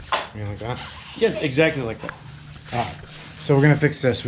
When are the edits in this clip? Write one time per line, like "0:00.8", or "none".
none